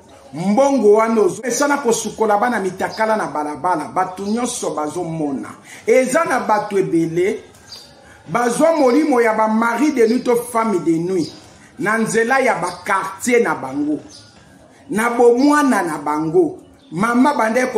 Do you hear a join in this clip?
yes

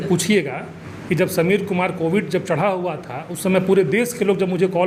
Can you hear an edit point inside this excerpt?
no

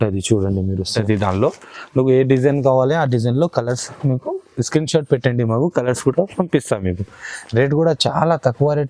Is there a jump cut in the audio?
yes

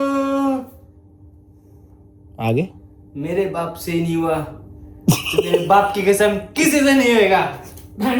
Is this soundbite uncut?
yes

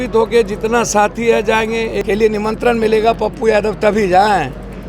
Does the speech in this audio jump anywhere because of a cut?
yes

